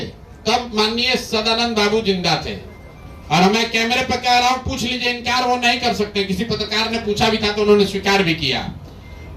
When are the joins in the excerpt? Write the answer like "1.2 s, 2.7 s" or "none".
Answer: none